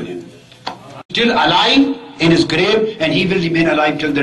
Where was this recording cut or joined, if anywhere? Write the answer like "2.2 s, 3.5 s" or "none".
1.1 s